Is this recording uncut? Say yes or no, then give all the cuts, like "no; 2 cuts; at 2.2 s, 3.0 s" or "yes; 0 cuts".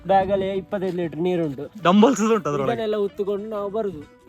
yes; 0 cuts